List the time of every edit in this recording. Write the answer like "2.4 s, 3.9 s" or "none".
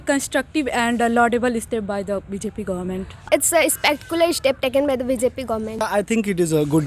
3.2 s, 5.9 s